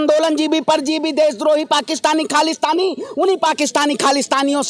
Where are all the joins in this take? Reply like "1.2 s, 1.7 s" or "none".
none